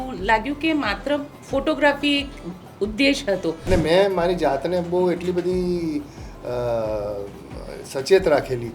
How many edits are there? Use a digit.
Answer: 1